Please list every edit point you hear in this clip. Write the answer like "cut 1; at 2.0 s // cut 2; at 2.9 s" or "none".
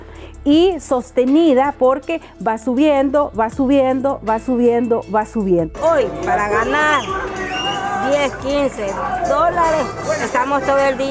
cut 1; at 5.7 s